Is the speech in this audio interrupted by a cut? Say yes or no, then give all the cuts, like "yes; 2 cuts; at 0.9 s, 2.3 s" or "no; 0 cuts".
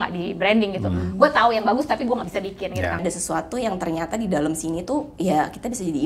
yes; 2 cuts; at 3.0 s, 5.1 s